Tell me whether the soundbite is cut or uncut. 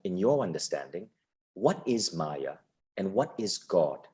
uncut